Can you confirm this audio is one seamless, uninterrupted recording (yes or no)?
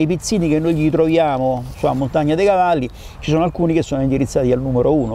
yes